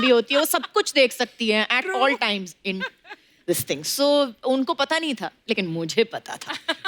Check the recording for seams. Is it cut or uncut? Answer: uncut